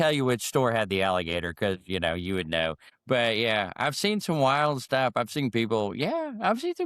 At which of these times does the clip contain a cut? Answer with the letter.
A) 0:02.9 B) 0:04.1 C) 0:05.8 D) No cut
A